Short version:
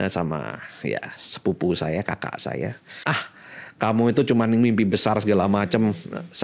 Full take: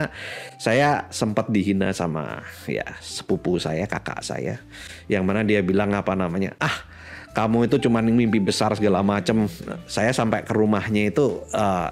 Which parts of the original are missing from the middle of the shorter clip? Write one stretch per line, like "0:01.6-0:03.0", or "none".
0:04.9-0:06.6